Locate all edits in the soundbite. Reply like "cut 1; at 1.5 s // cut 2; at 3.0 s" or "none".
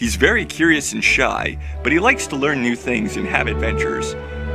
none